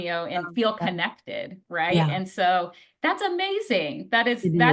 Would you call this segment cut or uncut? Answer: uncut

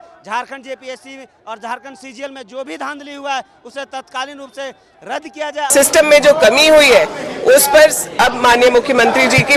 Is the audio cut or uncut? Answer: cut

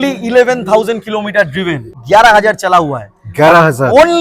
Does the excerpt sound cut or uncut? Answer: cut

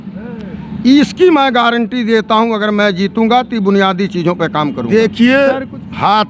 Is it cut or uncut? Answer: cut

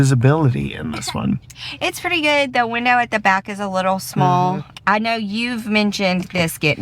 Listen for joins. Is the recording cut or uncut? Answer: cut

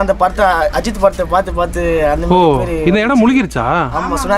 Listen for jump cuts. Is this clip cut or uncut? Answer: uncut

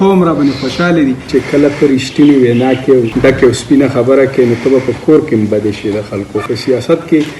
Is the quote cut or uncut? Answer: cut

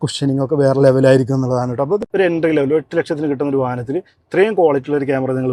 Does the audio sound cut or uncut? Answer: cut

